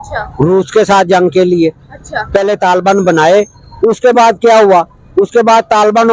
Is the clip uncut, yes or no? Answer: yes